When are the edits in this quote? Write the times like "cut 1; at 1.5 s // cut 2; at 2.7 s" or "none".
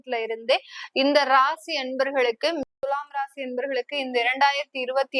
cut 1; at 2.8 s